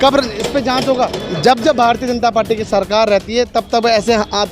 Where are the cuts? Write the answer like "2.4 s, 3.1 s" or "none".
1.2 s

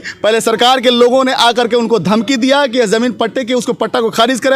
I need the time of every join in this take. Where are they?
none

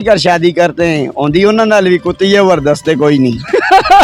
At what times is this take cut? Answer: none

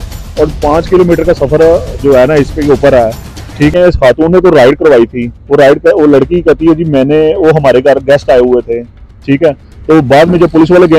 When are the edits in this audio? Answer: 3.7 s

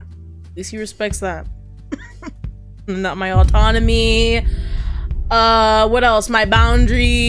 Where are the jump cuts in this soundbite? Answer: none

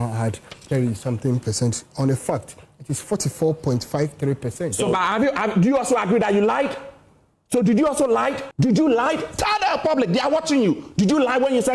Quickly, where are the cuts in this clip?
8.4 s

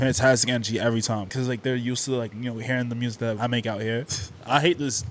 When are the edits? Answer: 1.3 s, 4.0 s

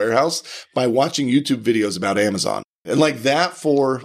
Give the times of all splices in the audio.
2.8 s

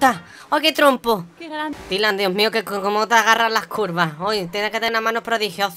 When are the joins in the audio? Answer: 1.7 s

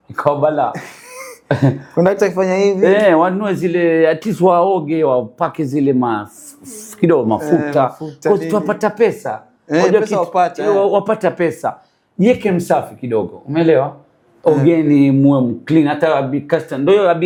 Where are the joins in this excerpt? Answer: none

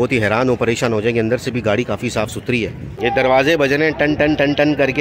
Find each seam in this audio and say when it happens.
2.9 s

